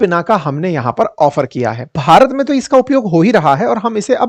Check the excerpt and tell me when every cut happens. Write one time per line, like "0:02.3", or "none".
0:01.9